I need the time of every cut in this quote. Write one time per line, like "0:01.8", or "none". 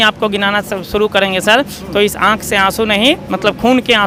none